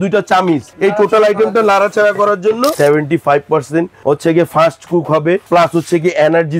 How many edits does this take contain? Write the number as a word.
three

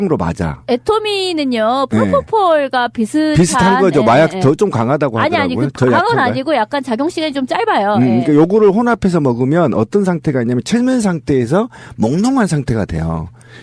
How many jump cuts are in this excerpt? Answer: zero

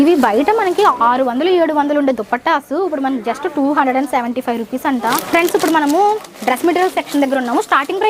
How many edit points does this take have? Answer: two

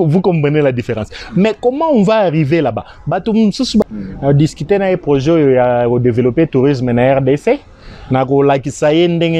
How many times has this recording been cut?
one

